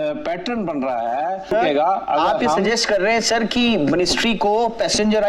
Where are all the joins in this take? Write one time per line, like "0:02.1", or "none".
0:01.5